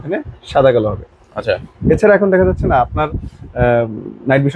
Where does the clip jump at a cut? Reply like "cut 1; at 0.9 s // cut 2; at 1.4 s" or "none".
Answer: none